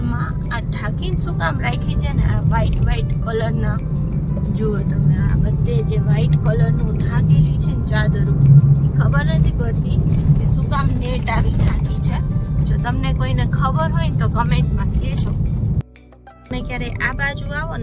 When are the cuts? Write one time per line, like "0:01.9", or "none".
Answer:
none